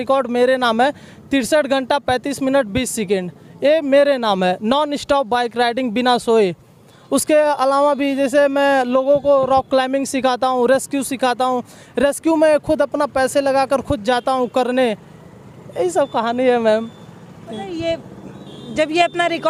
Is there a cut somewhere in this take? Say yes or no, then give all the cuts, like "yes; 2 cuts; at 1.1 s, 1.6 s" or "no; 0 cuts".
no; 0 cuts